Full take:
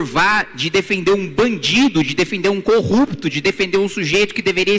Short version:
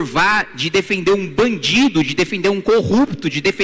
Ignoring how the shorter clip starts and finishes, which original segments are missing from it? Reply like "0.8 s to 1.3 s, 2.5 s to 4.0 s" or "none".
none